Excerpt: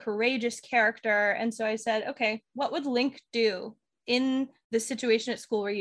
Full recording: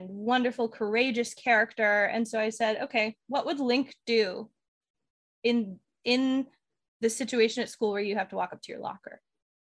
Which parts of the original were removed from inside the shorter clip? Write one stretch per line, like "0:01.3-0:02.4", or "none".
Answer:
0:04.6-0:05.9
0:06.6-0:06.9